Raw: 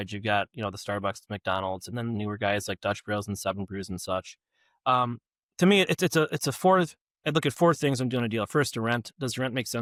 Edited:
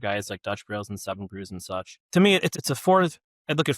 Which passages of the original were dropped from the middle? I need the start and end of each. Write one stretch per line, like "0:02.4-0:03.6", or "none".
0:04.3-0:05.4
0:06.0-0:06.3